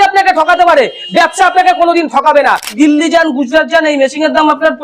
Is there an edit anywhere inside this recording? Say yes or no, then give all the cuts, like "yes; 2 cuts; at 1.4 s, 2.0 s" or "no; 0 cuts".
yes; 1 cut; at 2.7 s